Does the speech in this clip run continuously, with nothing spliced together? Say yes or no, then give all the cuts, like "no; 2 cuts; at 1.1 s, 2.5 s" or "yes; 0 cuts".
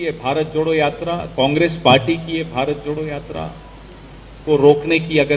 yes; 0 cuts